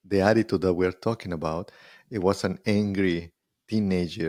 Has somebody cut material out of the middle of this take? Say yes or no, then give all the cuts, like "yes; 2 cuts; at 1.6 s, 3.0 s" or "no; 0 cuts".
no; 0 cuts